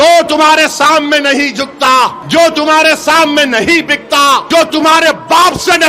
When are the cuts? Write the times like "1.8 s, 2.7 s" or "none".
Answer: 2.2 s, 4.4 s

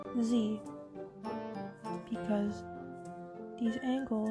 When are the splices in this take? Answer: none

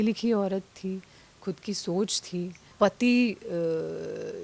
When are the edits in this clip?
2.6 s

